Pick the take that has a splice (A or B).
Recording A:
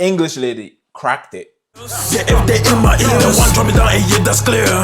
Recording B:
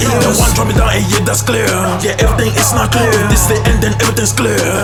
A